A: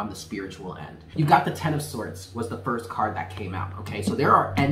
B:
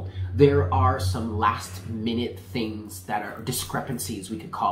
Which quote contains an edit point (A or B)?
A